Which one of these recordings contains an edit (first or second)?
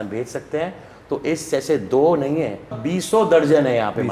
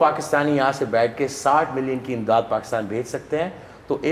first